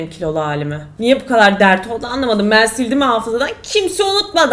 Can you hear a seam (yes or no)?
no